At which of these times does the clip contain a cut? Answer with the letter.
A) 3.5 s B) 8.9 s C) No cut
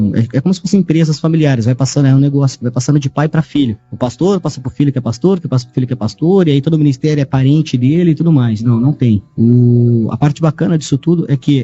B